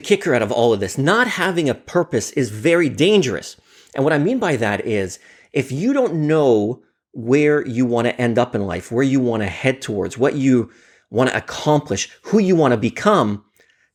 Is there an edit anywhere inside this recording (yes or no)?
no